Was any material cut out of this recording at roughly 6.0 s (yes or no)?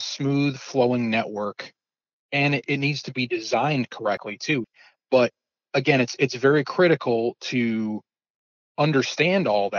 no